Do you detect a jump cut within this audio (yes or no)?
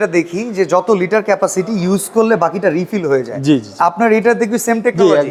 no